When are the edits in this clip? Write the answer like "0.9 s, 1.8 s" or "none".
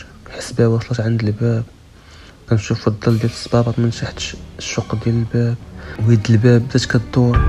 5.9 s